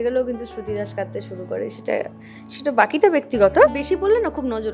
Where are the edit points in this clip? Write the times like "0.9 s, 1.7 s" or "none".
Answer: 3.7 s